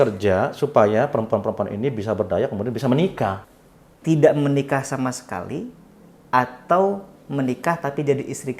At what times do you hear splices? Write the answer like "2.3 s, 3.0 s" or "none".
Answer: 3.4 s